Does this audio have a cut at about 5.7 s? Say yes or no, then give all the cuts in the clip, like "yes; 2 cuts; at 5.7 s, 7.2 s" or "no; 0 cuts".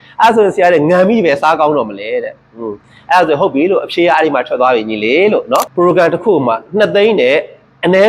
yes; 1 cut; at 5.7 s